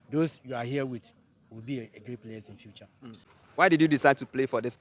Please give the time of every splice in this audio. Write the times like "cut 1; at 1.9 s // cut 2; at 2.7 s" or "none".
cut 1; at 3.7 s